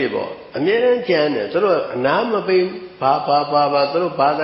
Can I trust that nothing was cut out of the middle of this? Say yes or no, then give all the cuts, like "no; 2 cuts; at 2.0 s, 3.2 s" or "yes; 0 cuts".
yes; 0 cuts